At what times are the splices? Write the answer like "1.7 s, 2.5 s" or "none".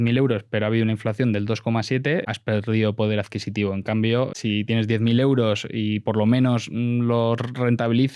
2.3 s, 4.3 s